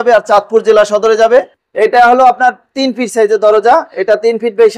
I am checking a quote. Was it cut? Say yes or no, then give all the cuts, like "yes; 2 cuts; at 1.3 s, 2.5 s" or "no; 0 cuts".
yes; 1 cut; at 1.6 s